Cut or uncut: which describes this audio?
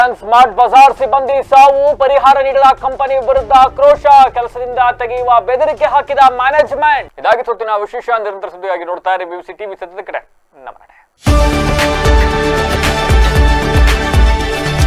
uncut